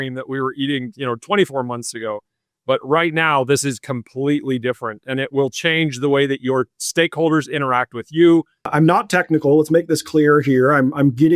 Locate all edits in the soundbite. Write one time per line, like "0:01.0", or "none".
0:08.7